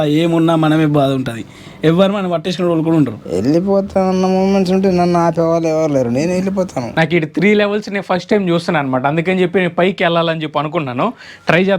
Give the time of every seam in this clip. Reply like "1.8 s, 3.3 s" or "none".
3.2 s, 6.8 s